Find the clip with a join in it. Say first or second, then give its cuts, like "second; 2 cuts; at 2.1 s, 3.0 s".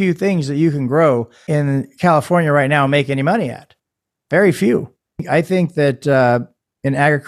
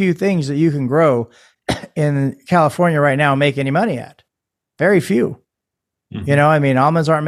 first; 2 cuts; at 1.4 s, 5.2 s